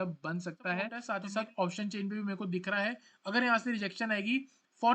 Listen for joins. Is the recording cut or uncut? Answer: cut